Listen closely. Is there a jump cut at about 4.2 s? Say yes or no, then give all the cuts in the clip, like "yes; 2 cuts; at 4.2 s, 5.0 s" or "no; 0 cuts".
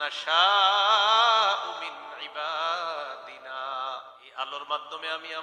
yes; 1 cut; at 4.2 s